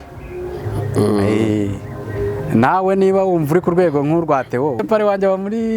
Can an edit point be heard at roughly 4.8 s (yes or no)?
yes